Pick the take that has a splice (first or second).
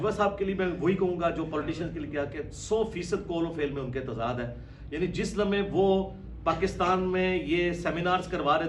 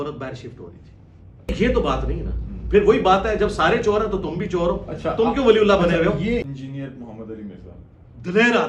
second